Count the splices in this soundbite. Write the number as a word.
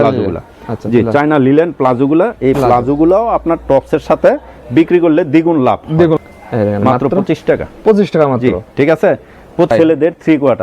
two